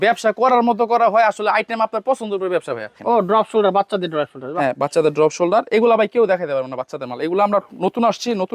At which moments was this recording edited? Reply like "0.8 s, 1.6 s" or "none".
2.9 s